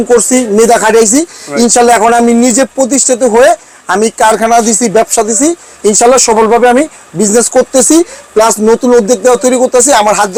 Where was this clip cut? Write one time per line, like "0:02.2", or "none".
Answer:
none